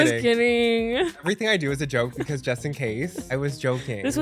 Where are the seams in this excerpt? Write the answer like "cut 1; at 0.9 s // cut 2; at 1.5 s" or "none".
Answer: cut 1; at 1.2 s // cut 2; at 3.3 s